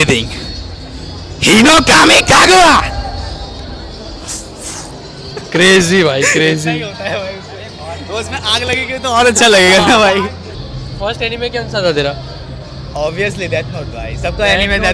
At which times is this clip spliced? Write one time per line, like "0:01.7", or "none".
none